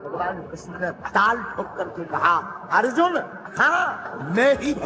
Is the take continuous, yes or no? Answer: yes